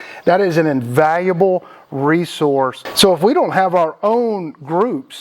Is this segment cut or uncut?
cut